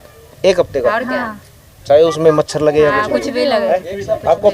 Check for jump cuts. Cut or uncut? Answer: uncut